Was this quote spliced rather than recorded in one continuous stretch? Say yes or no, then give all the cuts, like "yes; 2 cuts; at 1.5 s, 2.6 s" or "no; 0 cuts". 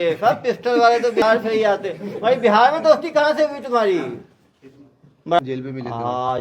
yes; 2 cuts; at 1.2 s, 5.4 s